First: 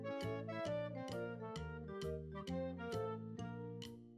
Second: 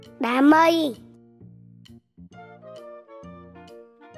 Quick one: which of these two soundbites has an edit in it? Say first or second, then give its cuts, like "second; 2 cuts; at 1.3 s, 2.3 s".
second; 1 cut; at 1.0 s